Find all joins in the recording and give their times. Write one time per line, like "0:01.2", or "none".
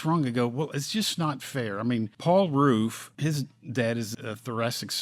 0:02.1
0:03.1
0:04.1